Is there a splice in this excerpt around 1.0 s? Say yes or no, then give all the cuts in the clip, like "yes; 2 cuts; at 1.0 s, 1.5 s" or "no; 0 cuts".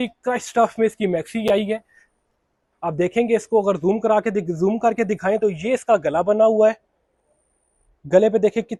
no; 0 cuts